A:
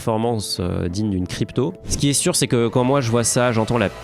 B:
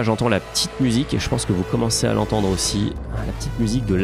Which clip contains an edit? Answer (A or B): A